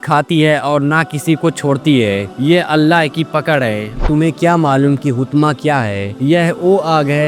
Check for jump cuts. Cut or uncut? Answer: cut